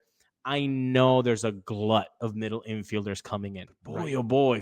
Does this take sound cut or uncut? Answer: cut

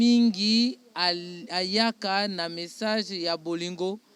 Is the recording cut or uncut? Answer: uncut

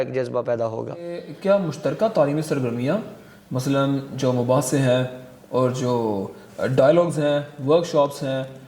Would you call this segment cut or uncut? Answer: cut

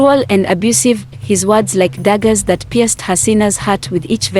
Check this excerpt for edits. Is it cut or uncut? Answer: uncut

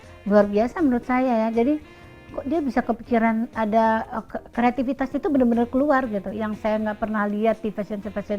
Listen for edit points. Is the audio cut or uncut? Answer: uncut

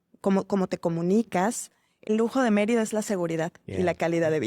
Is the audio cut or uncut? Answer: cut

